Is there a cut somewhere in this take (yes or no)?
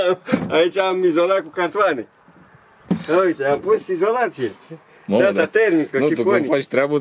no